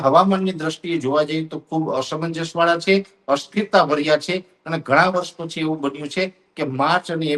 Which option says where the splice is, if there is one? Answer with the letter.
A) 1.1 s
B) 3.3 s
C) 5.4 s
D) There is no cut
D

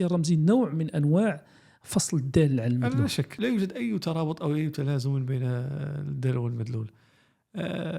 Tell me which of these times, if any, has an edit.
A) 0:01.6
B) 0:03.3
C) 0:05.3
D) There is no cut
B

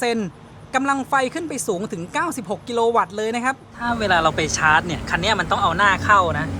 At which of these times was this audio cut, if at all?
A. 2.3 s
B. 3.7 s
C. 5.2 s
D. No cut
B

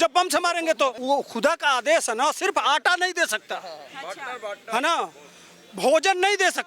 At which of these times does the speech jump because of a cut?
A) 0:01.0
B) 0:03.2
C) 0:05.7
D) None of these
A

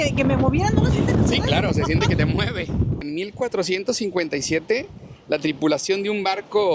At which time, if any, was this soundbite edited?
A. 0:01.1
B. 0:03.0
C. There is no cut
B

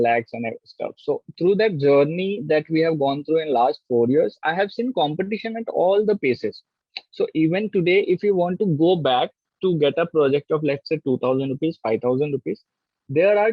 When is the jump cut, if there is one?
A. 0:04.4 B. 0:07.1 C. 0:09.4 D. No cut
D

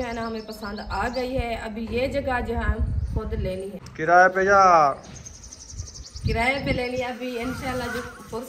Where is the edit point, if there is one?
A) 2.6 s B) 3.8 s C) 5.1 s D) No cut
B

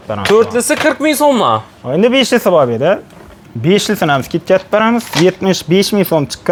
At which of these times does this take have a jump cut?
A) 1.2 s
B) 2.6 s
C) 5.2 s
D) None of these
D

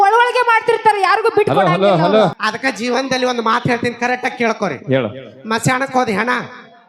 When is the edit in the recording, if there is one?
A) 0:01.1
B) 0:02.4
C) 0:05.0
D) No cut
B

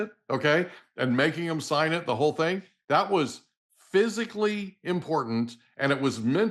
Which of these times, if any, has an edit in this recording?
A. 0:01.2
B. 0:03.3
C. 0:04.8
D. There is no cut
D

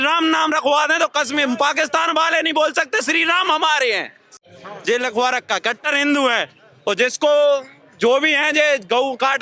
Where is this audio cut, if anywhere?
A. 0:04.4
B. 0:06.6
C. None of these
A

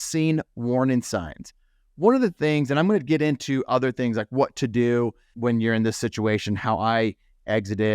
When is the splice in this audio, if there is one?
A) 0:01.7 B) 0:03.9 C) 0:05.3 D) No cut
C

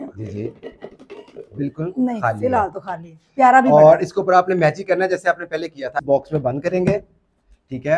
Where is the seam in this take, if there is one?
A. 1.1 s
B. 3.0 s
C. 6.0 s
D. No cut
C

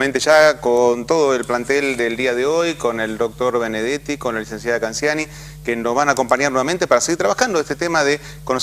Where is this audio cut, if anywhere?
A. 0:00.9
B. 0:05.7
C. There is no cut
B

